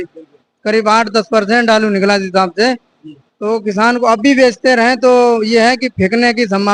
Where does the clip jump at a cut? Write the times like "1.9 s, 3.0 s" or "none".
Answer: none

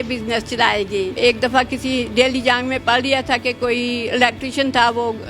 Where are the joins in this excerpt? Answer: 1.2 s

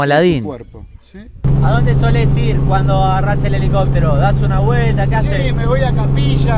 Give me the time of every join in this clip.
1.5 s

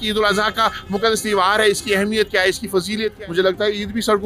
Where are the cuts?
3.1 s

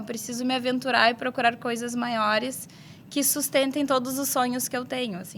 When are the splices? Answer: none

